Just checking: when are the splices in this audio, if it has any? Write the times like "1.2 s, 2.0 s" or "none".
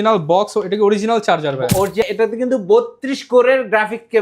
2.1 s